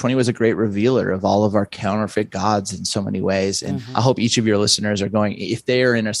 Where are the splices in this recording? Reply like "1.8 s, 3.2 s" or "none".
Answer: 3.8 s